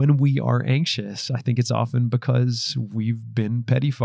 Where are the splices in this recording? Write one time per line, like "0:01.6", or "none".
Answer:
none